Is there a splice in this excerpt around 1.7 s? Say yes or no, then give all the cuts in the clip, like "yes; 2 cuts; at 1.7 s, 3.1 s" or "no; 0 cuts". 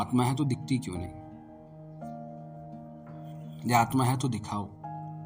yes; 2 cuts; at 1.7 s, 3.5 s